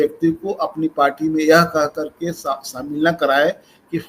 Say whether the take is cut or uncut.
uncut